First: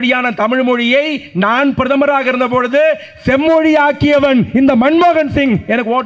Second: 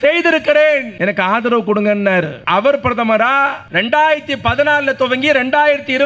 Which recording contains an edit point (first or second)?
second